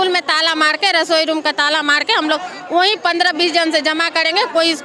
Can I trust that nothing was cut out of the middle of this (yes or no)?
yes